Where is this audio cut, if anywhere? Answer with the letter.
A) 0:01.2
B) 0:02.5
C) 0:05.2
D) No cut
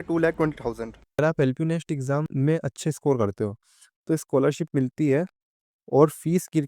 A